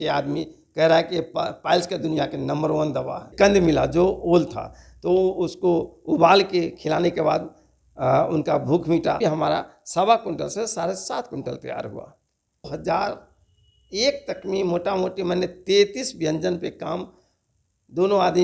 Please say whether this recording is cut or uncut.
cut